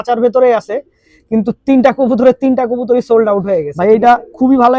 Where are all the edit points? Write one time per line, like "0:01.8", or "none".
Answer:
0:03.7